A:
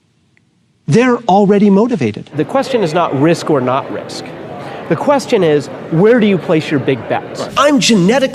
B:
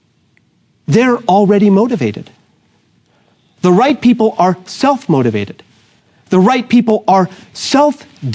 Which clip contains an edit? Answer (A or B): A